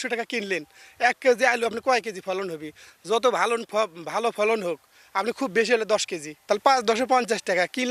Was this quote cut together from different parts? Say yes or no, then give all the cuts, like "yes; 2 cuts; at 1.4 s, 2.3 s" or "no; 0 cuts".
no; 0 cuts